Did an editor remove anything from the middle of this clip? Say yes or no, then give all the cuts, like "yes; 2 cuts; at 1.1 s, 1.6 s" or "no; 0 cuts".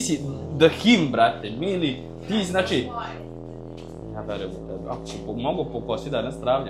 yes; 1 cut; at 4.0 s